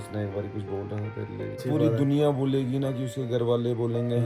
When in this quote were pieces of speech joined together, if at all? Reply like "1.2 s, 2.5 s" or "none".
1.6 s